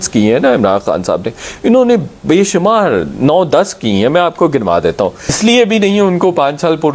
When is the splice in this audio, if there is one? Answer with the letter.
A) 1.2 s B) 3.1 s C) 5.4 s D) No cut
C